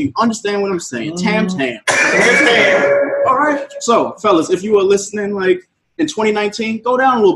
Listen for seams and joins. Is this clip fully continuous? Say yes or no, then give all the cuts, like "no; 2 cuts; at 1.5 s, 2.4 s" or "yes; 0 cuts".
no; 1 cut; at 3.7 s